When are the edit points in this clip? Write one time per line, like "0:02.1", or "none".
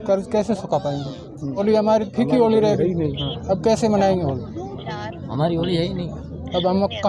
0:01.6